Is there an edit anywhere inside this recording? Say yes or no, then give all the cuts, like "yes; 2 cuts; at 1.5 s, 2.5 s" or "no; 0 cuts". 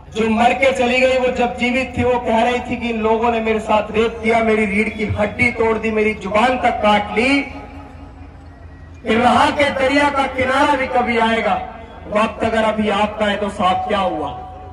no; 0 cuts